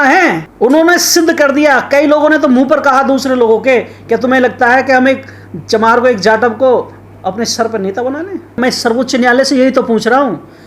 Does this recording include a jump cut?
yes; 1 cut; at 8.6 s

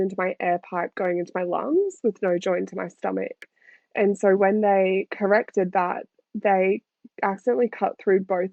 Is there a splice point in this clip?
no; 0 cuts

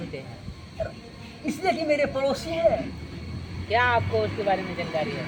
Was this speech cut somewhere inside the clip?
no; 0 cuts

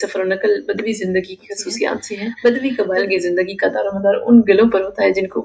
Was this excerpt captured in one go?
no; 1 cut; at 2.3 s

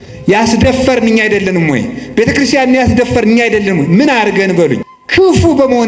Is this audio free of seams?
no; 1 cut; at 4.9 s

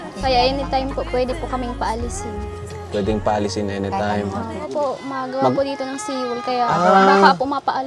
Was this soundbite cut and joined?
yes; 1 cut; at 4.7 s

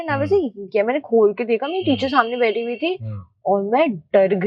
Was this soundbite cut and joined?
no; 0 cuts

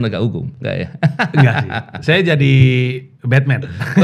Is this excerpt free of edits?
yes; 0 cuts

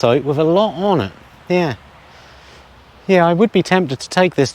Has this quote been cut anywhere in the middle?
no; 0 cuts

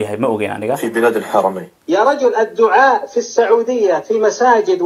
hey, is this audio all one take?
no; 1 cut; at 1.8 s

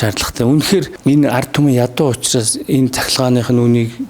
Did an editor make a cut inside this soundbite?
yes; 1 cut; at 0.9 s

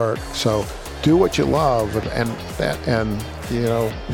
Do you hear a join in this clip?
no; 0 cuts

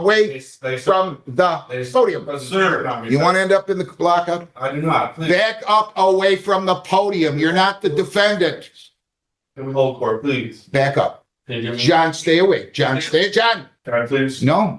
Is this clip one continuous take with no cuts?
no; 1 cut; at 13.7 s

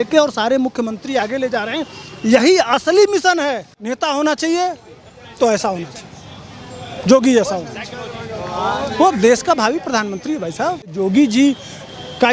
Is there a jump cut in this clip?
yes; 2 cuts; at 3.9 s, 10.9 s

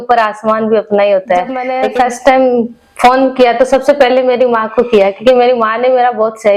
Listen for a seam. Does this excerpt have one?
yes; 1 cut; at 1.7 s

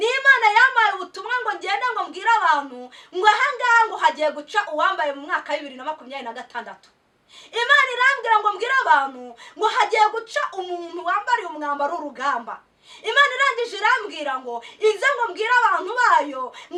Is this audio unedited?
yes; 0 cuts

